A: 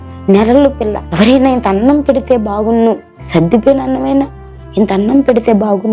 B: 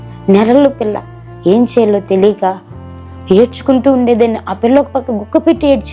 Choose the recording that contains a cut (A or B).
A